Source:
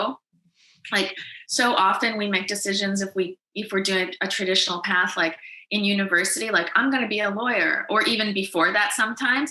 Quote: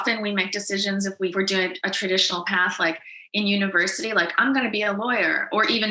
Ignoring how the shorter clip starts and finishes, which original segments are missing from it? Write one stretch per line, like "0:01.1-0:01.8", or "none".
0:03.3-0:03.7